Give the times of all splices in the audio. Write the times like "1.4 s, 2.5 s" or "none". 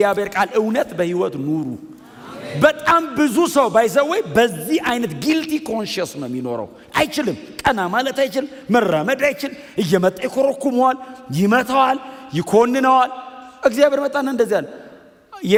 none